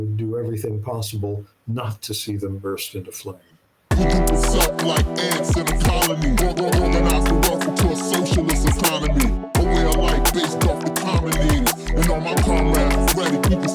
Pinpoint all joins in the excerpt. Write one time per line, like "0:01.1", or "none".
0:03.9